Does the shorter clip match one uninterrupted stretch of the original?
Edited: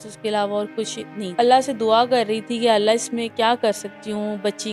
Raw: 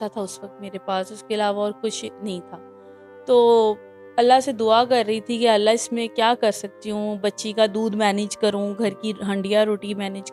no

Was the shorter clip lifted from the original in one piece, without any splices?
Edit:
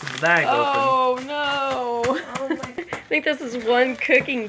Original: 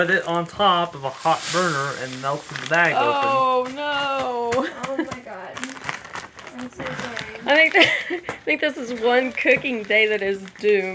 no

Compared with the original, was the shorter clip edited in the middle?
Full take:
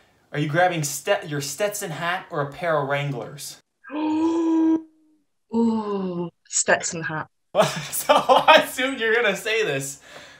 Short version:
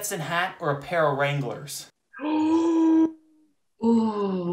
no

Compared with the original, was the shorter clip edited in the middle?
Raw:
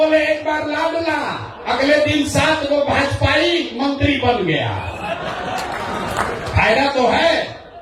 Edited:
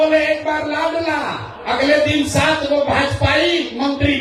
no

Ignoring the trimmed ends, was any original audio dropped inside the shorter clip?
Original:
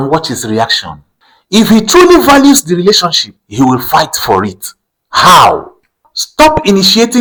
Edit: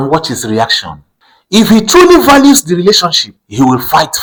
no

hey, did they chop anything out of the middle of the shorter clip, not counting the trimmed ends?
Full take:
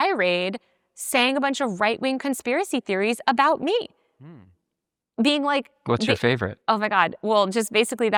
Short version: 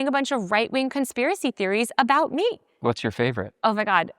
yes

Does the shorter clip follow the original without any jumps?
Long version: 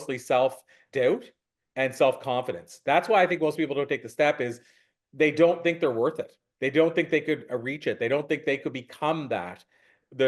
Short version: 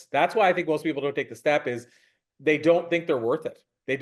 yes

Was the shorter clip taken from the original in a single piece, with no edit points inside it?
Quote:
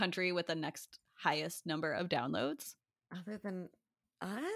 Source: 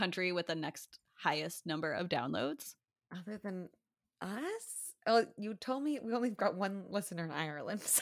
yes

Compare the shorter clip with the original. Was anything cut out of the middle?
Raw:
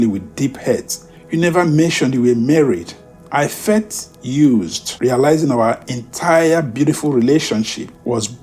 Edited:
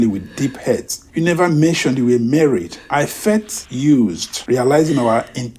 yes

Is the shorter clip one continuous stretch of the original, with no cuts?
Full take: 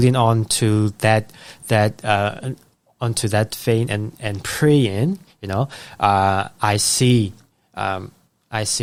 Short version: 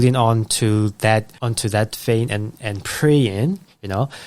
no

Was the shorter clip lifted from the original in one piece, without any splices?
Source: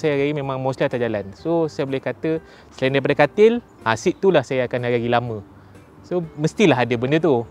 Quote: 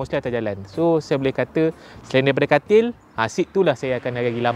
yes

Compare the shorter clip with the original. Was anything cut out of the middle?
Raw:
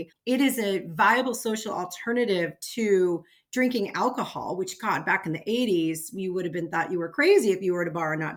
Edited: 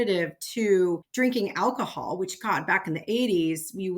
yes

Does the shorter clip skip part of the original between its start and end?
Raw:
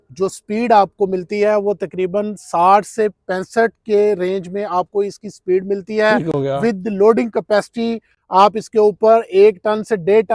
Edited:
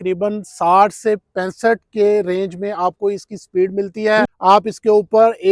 yes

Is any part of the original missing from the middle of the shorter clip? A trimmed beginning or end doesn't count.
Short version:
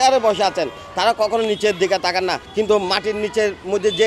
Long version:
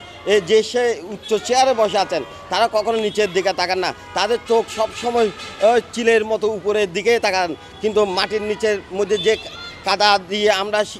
yes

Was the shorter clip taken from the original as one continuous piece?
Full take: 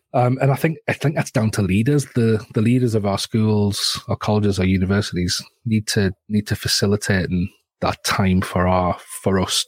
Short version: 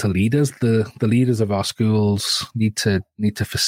no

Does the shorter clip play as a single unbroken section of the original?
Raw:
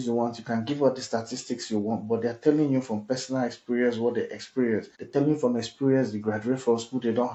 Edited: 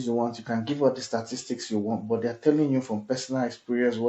yes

